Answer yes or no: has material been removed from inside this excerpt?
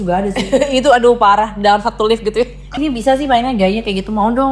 yes